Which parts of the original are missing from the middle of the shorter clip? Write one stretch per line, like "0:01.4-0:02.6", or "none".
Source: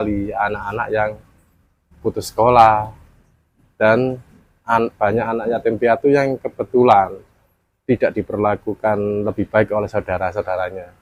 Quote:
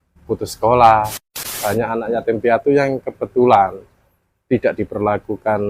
0:03.3-0:05.0